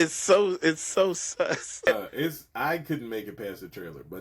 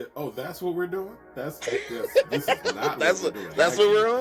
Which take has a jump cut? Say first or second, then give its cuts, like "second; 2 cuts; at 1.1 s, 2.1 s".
first; 1 cut; at 1.9 s